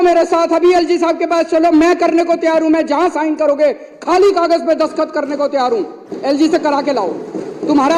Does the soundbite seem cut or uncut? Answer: uncut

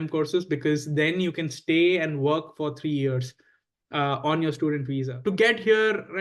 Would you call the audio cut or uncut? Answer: cut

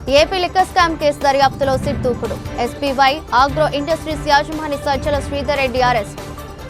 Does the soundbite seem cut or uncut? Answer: uncut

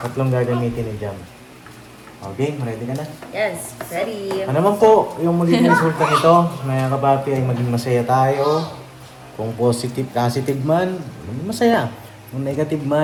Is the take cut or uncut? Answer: uncut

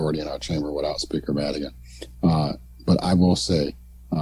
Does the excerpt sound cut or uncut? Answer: uncut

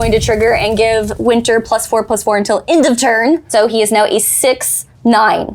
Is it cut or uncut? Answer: cut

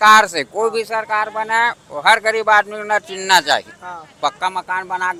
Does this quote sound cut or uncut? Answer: uncut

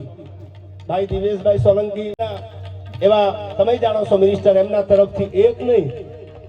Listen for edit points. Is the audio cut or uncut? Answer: cut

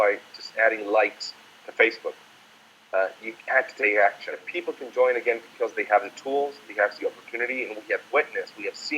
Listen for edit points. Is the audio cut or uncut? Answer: cut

